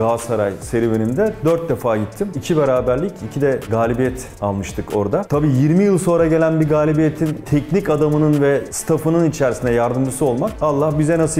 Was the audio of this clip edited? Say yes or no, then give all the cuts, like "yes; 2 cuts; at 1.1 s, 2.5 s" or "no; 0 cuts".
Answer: no; 0 cuts